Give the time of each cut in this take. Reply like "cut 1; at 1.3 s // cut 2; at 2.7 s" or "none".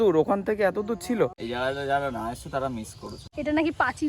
cut 1; at 1.3 s // cut 2; at 3.2 s